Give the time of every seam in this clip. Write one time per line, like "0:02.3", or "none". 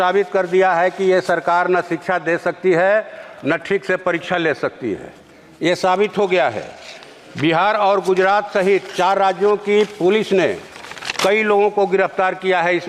none